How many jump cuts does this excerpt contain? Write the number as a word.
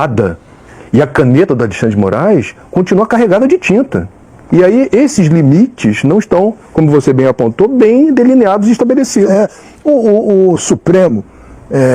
zero